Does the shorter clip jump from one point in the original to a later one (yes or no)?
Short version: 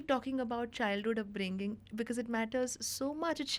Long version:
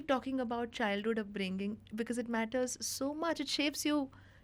no